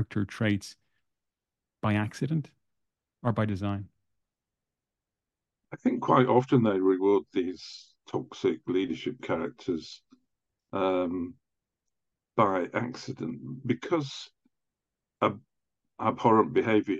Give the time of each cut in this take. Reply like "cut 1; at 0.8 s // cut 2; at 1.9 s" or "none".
none